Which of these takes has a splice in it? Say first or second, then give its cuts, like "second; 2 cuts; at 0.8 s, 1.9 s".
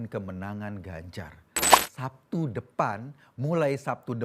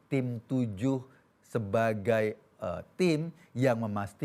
first; 1 cut; at 1.7 s